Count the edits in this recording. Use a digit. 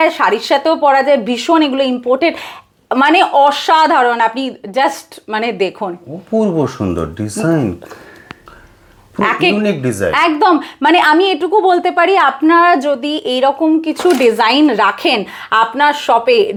0